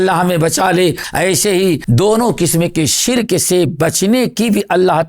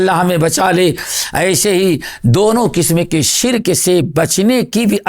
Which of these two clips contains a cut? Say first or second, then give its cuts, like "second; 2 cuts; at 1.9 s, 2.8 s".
first; 2 cuts; at 1.0 s, 1.8 s